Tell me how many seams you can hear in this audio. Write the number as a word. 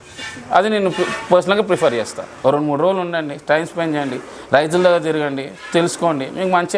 one